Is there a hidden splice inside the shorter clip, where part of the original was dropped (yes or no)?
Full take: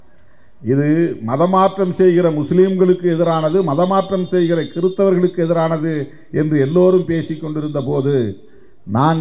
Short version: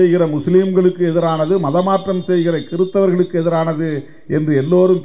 no